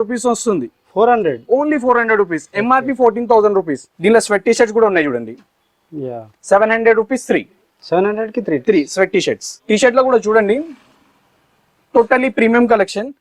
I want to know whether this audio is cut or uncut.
cut